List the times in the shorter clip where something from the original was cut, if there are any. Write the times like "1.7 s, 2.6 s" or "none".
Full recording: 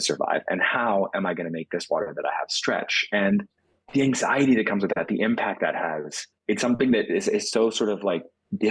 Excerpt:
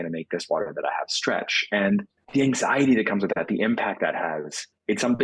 2.2 s